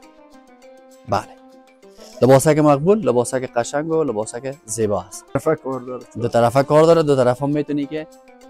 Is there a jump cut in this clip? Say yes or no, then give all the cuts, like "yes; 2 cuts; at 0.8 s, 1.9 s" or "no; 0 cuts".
yes; 1 cut; at 5.4 s